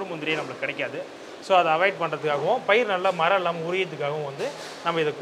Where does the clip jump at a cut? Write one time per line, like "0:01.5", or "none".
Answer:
none